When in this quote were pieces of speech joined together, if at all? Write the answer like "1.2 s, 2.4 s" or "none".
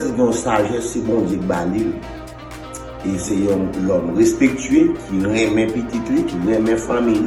none